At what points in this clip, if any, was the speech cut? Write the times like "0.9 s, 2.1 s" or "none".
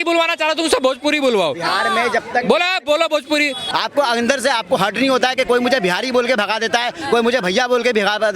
3.6 s